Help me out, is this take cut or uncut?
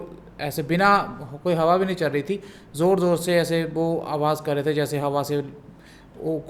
uncut